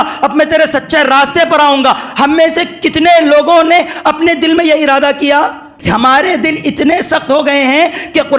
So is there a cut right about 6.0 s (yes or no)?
yes